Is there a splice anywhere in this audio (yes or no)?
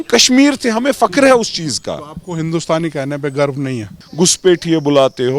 yes